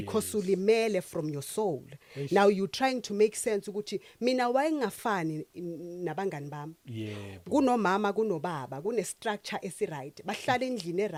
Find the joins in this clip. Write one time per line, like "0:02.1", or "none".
none